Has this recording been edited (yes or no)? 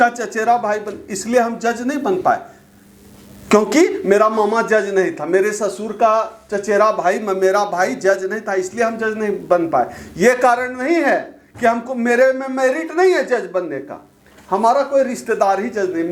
no